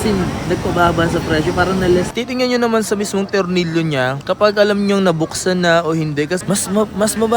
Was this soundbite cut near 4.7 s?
no; 2 cuts; at 2.1 s, 6.4 s

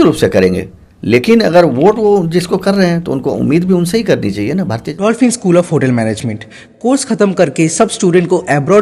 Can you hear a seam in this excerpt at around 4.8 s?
yes; 1 cut; at 4.8 s

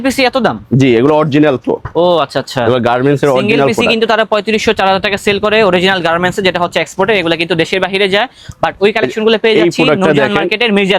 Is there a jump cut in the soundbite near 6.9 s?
no; 0 cuts

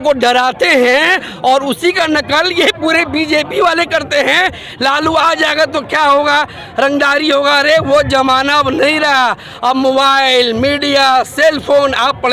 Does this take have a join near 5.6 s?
no; 0 cuts

